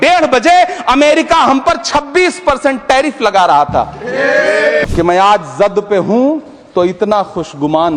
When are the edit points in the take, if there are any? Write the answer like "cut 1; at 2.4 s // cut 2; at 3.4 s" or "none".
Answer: cut 1; at 4.8 s